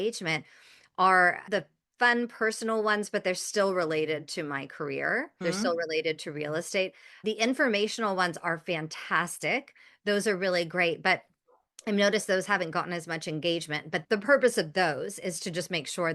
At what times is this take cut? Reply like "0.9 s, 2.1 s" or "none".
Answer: 7.2 s